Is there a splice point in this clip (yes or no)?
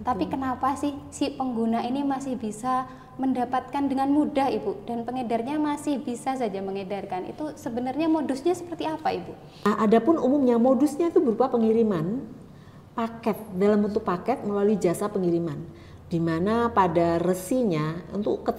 yes